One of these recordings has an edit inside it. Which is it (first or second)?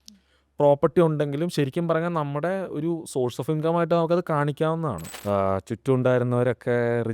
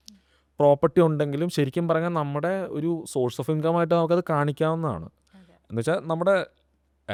first